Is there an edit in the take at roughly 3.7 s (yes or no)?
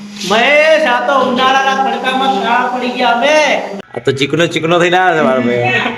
yes